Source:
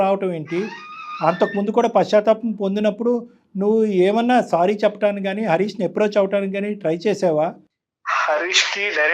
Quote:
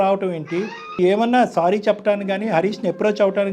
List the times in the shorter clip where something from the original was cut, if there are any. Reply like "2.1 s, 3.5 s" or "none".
0.9 s